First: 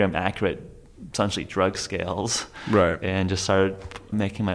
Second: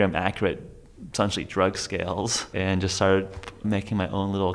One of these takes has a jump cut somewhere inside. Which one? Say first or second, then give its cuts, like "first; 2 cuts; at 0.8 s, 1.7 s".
second; 1 cut; at 2.5 s